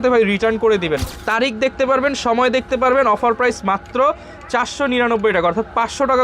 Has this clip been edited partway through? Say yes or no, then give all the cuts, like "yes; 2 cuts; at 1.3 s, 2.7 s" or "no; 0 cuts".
yes; 1 cut; at 1.1 s